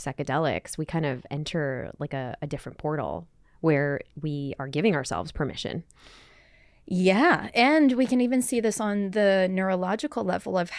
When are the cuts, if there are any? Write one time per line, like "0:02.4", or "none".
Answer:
none